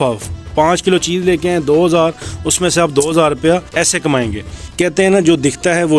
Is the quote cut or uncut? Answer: cut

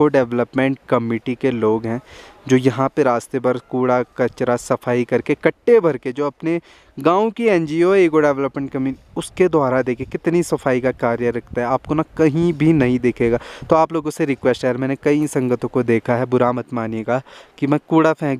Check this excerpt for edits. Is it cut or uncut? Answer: uncut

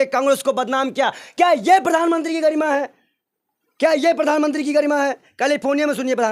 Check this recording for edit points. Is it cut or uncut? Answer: uncut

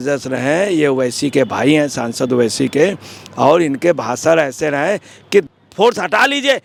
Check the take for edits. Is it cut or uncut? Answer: uncut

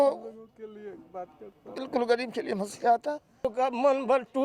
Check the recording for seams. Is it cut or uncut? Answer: cut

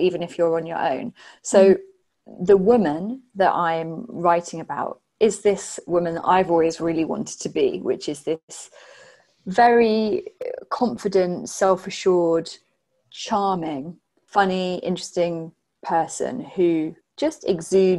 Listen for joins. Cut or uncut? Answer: cut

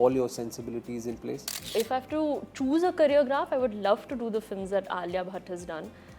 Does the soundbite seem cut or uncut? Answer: cut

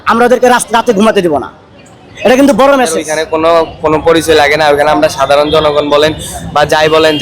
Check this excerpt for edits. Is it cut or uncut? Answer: cut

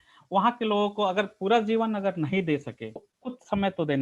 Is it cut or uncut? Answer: cut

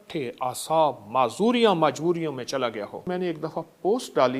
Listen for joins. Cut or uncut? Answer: cut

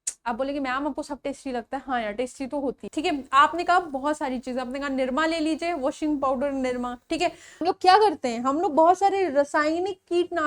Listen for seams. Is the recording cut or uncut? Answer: cut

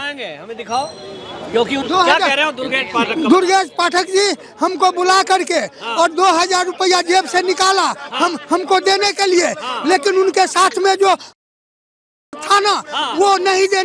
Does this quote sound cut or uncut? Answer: cut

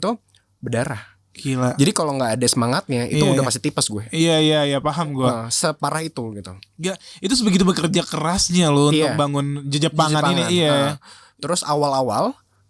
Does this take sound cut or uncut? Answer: uncut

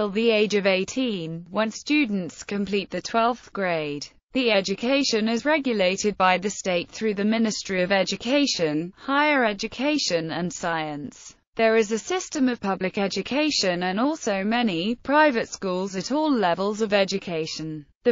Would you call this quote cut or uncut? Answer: uncut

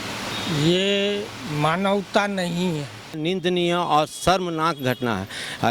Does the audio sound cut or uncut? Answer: cut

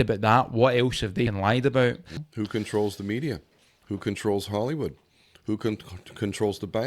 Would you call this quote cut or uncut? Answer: cut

